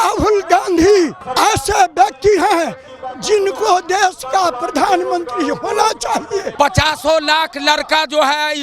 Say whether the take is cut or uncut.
cut